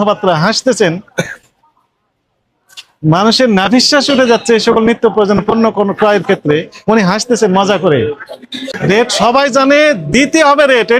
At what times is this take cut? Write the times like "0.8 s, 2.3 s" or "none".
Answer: 8.7 s